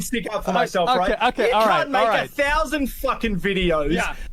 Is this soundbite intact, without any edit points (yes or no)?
no